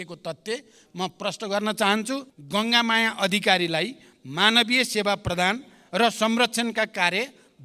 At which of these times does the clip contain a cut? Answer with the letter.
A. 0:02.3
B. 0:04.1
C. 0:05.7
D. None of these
A